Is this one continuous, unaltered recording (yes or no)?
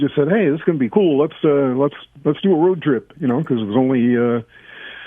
yes